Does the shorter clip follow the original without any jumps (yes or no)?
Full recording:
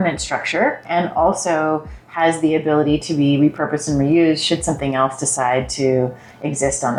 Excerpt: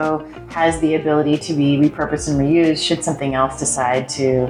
yes